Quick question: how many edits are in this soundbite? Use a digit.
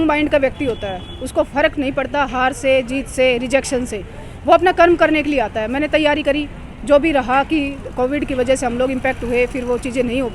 0